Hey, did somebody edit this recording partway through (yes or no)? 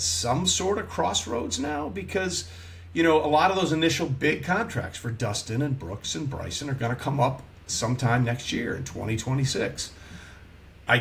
no